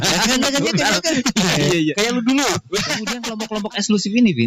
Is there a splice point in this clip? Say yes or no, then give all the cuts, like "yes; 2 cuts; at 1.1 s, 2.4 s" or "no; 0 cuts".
yes; 1 cut; at 3.3 s